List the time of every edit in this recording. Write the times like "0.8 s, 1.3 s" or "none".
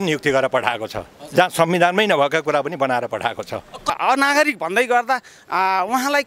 3.9 s